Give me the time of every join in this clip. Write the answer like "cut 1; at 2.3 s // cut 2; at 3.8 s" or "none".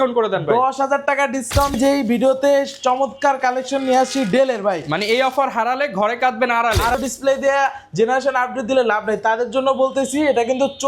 cut 1; at 1.8 s // cut 2; at 7.0 s